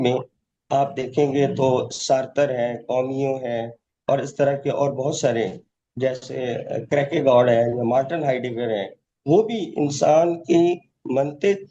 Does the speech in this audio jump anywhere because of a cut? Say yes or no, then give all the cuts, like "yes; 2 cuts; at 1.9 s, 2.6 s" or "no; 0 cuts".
no; 0 cuts